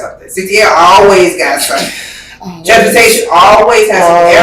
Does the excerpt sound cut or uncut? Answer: uncut